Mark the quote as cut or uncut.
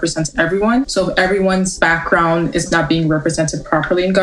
cut